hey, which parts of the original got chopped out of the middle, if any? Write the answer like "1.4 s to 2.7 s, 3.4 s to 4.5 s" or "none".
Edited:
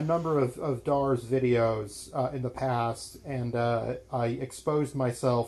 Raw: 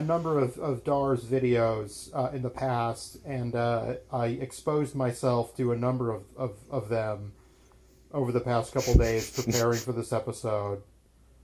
none